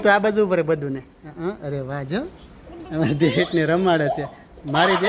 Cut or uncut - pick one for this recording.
uncut